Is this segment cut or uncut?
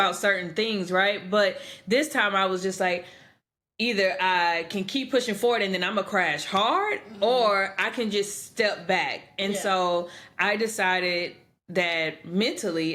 uncut